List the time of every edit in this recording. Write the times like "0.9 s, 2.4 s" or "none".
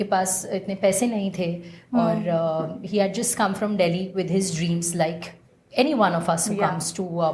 none